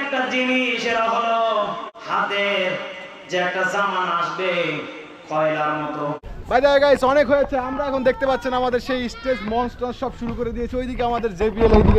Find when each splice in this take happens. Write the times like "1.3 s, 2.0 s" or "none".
1.9 s, 6.4 s